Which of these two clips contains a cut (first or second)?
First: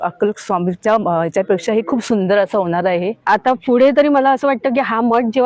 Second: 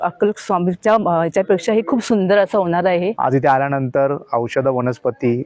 second